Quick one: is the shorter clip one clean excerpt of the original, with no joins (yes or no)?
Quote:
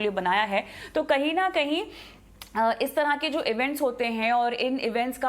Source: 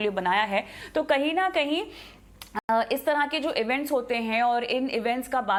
no